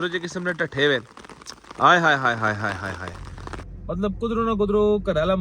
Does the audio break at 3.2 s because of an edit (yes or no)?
yes